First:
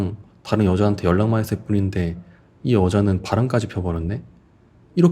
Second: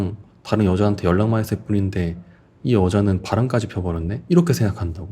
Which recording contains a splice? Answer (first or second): second